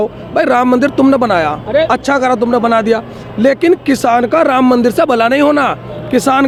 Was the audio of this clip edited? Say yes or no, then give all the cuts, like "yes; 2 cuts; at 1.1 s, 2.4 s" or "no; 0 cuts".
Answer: no; 0 cuts